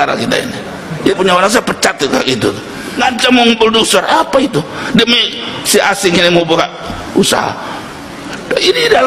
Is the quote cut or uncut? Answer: cut